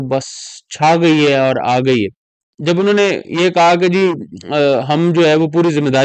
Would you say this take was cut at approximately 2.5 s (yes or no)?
yes